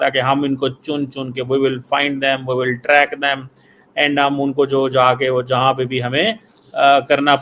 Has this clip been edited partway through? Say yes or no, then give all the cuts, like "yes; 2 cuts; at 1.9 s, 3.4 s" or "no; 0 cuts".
no; 0 cuts